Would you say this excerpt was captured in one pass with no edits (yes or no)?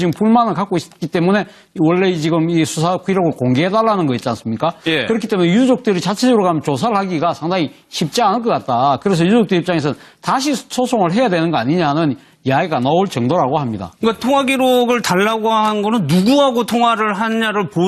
no